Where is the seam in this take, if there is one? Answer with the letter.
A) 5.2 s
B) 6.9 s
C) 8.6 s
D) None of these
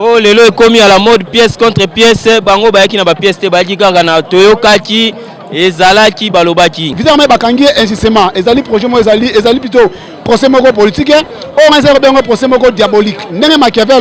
B